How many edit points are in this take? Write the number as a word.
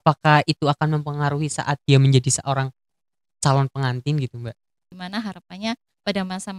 one